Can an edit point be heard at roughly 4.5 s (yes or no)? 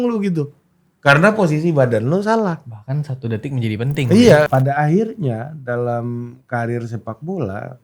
yes